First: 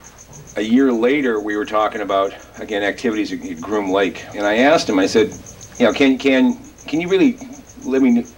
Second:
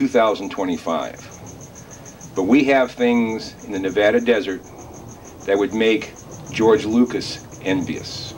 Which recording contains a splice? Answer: first; 1 cut; at 4.5 s

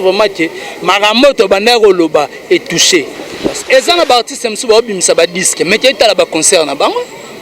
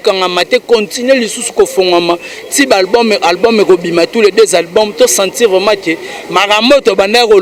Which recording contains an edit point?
first; 1 cut; at 3.6 s

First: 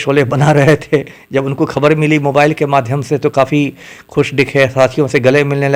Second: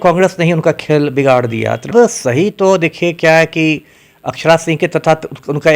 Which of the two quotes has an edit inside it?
second; 1 cut; at 1.9 s

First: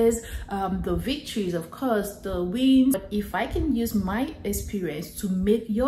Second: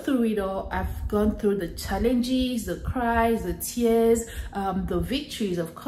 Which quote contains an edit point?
first; 1 cut; at 3.0 s

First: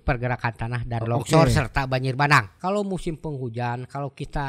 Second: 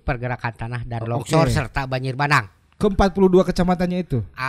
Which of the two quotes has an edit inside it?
first; 1 cut; at 2.5 s

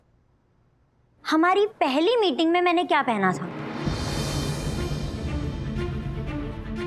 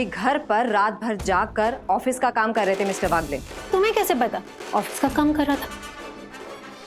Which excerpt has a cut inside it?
second; 1 cut; at 4.5 s

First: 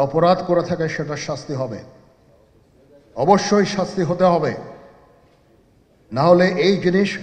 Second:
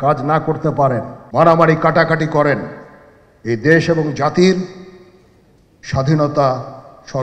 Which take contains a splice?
second; 1 cut; at 1.2 s

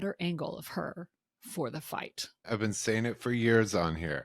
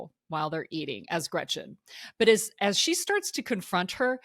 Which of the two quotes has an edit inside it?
first; 1 cut; at 2.5 s

